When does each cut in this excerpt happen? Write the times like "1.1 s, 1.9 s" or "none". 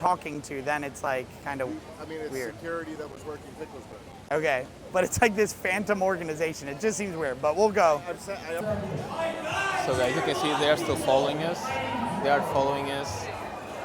8.6 s